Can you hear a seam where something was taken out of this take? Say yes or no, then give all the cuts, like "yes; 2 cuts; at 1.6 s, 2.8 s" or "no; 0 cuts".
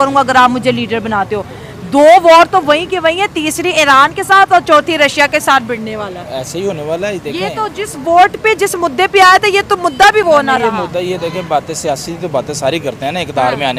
no; 0 cuts